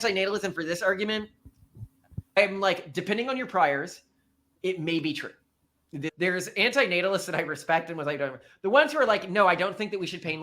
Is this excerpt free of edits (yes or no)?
no